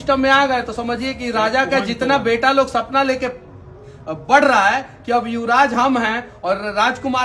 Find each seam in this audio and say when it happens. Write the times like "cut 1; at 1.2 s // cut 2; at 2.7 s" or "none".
none